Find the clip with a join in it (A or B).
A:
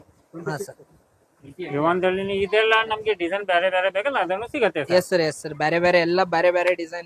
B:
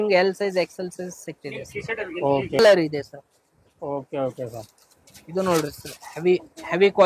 B